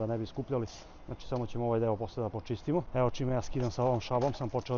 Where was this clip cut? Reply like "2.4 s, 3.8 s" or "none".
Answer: none

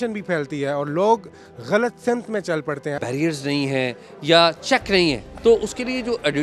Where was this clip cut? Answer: 3.0 s, 5.3 s

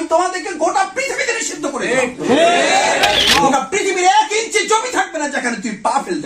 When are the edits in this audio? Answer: 3.5 s

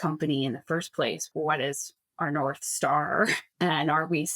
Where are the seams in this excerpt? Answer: 1.3 s, 3.4 s

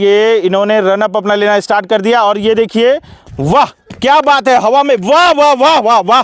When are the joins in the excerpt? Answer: none

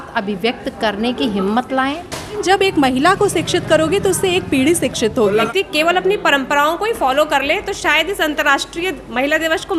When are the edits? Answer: 2.4 s, 5.5 s

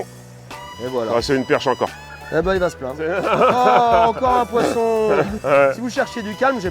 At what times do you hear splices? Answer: 3.1 s, 5.4 s

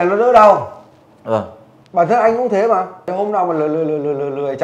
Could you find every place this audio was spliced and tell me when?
3.1 s

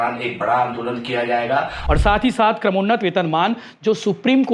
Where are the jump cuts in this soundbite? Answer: 1.8 s

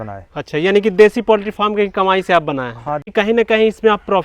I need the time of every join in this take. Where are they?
3.1 s

